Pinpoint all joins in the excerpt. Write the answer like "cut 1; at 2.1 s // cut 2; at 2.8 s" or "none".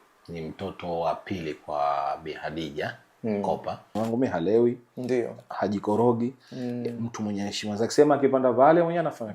cut 1; at 3.9 s